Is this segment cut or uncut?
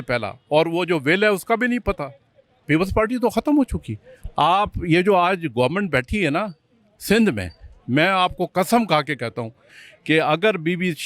cut